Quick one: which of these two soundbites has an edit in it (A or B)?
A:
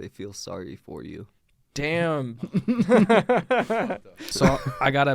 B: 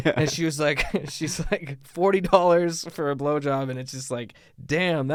A